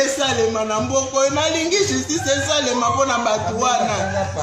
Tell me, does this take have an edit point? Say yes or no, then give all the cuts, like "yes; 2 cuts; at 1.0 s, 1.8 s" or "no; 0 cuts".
no; 0 cuts